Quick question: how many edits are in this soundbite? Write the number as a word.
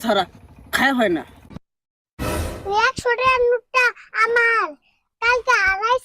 one